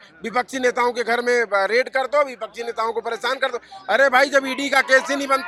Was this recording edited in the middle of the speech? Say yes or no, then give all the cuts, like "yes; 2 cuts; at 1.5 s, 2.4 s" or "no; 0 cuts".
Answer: no; 0 cuts